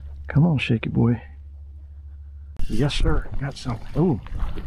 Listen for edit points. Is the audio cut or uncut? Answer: cut